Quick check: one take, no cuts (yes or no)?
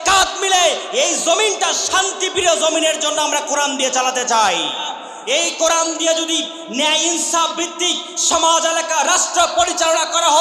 no